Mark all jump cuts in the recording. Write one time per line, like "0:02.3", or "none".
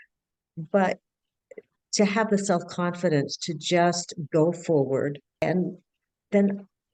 0:05.4